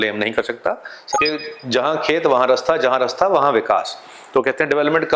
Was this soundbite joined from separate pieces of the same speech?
yes; 1 cut; at 1.1 s

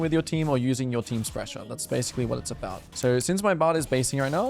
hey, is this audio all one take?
no; 1 cut; at 2.9 s

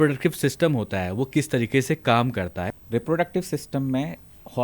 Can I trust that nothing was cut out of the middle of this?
no; 1 cut; at 2.7 s

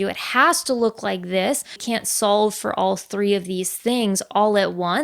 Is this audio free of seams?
no; 1 cut; at 1.8 s

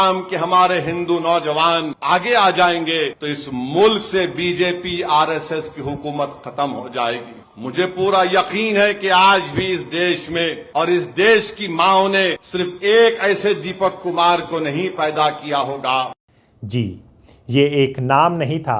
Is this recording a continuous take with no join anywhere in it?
yes; 0 cuts

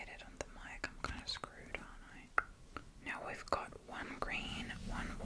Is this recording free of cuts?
no; 1 cut; at 2.3 s

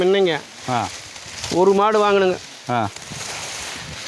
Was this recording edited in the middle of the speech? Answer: no; 0 cuts

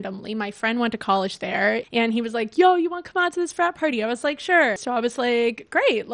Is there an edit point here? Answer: yes; 2 cuts; at 1.9 s, 4.8 s

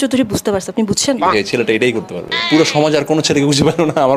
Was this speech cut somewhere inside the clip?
yes; 2 cuts; at 1.2 s, 2.4 s

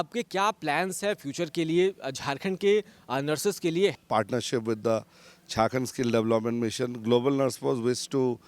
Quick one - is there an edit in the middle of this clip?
yes; 1 cut; at 4.0 s

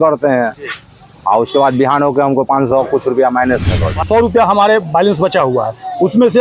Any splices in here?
yes; 1 cut; at 4.0 s

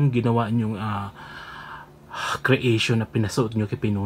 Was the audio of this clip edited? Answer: no; 0 cuts

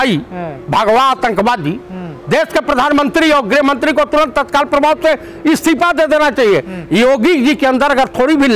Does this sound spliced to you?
no; 0 cuts

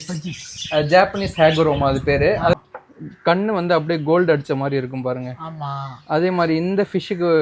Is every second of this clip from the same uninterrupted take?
no; 1 cut; at 2.6 s

